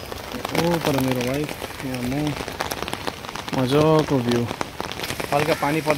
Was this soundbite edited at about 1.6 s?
no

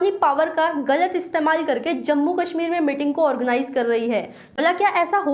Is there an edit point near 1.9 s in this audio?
no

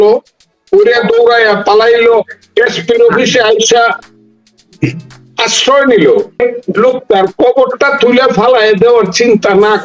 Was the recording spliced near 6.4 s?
yes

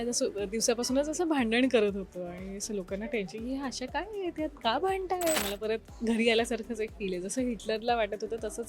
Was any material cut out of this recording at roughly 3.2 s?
no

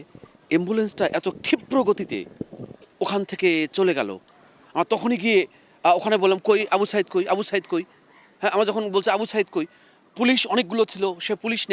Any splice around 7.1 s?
no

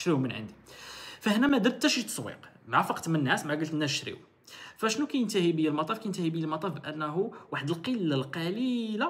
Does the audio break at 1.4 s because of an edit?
no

